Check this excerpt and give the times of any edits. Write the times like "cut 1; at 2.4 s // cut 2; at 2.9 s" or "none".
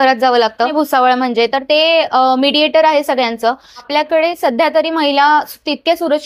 cut 1; at 0.7 s // cut 2; at 3.8 s